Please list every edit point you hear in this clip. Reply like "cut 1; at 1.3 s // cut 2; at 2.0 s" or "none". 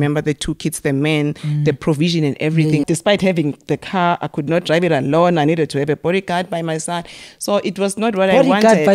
cut 1; at 2.9 s